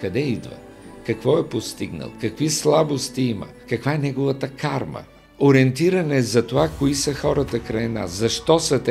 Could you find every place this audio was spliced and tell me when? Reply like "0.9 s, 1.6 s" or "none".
3.6 s, 5.2 s